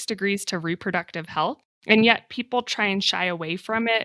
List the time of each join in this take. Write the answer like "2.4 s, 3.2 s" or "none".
1.7 s